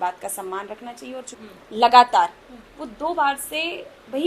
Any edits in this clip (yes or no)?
yes